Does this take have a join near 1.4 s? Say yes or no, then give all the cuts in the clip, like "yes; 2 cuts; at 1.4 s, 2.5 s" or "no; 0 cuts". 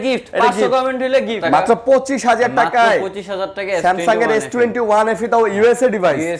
yes; 1 cut; at 1.4 s